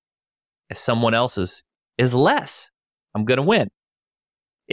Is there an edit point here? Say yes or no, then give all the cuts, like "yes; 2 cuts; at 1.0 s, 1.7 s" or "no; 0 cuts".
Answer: no; 0 cuts